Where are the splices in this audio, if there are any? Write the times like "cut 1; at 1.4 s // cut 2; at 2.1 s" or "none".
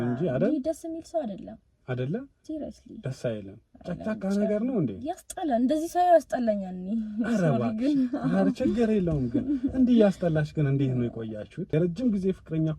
cut 1; at 11.7 s